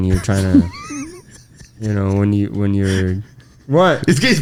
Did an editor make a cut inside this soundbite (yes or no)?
no